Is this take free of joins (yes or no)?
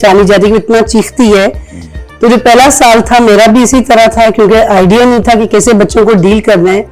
yes